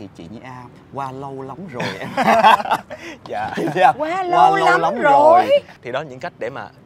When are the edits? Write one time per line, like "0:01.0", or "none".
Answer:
0:05.8